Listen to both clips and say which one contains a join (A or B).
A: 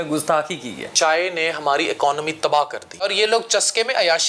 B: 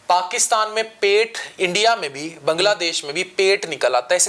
A